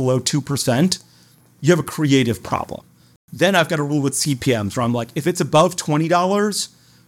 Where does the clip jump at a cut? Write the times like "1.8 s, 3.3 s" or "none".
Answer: 3.0 s